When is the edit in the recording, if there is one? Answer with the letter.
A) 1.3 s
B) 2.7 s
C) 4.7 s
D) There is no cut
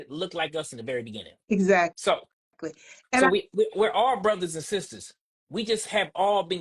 D